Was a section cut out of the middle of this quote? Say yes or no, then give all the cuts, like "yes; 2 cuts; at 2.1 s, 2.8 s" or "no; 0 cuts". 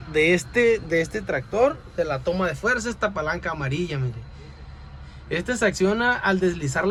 no; 0 cuts